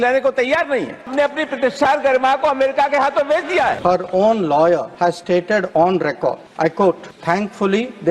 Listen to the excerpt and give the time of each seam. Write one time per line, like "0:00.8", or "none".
0:01.1
0:03.8
0:04.9
0:06.4
0:07.1